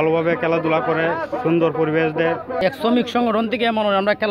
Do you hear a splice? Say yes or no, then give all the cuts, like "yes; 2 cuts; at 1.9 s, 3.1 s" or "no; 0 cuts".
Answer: yes; 1 cut; at 2.6 s